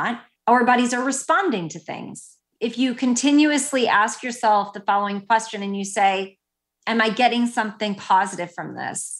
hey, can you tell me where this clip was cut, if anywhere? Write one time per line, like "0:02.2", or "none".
0:02.2